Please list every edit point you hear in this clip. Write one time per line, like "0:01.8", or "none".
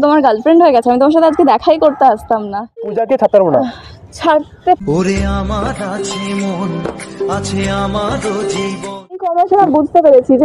0:02.9
0:09.3